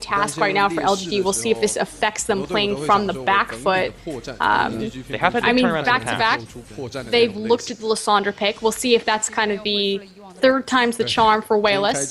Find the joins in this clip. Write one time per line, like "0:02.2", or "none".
none